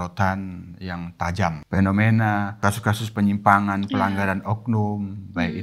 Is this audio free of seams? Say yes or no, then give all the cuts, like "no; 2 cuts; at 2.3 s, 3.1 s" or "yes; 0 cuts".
no; 2 cuts; at 1.6 s, 2.6 s